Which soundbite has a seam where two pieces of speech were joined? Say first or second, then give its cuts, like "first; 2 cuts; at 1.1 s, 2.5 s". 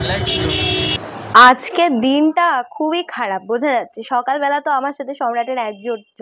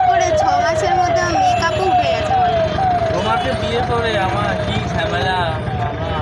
first; 1 cut; at 1.0 s